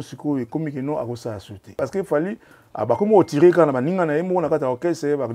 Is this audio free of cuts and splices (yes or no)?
no